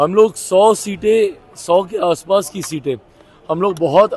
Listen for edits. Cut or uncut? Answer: uncut